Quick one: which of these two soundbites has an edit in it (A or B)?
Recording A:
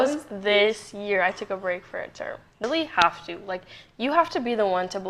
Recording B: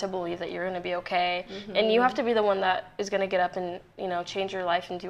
A